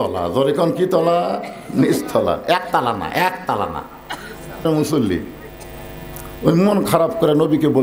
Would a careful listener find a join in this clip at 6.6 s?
no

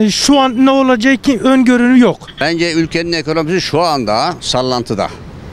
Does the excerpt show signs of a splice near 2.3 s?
yes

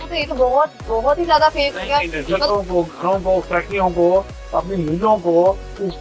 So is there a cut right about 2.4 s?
yes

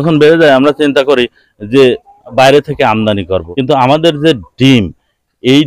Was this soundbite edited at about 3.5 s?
yes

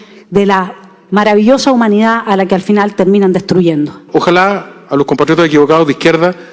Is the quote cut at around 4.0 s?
yes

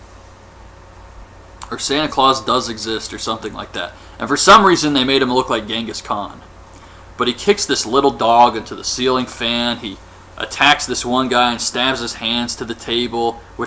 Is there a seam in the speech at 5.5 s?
yes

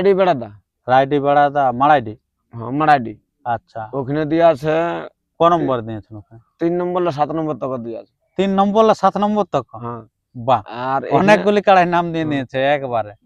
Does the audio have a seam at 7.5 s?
no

